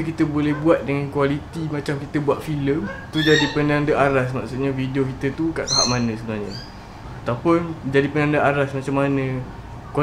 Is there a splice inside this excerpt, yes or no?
no